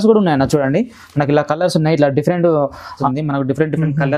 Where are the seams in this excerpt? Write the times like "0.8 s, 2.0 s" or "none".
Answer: 3.0 s